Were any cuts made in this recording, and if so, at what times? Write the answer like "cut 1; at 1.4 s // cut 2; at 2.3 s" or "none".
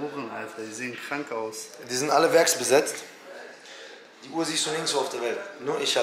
none